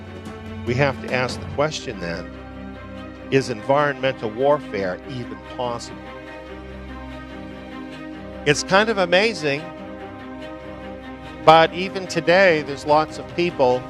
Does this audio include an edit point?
yes; 1 cut; at 12.7 s

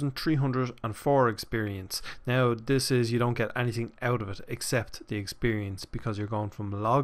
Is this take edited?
no; 0 cuts

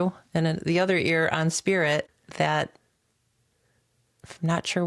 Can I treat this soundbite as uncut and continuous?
no; 1 cut; at 2.1 s

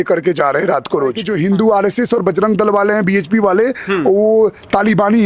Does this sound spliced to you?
yes; 1 cut; at 1.3 s

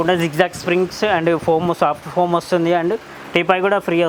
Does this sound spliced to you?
no; 0 cuts

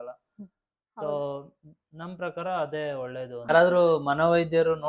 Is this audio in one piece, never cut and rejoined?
no; 1 cut; at 3.5 s

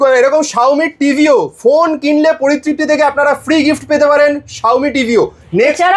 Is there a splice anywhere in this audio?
no; 0 cuts

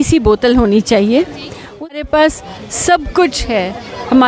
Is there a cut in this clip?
yes; 1 cut; at 2.0 s

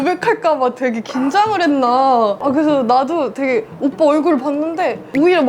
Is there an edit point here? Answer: yes; 1 cut; at 2.4 s

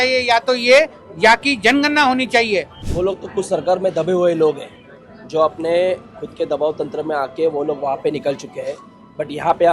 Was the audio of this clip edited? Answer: yes; 1 cut; at 2.8 s

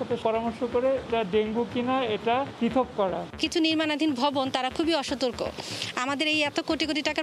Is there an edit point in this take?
yes; 2 cuts; at 1.1 s, 3.4 s

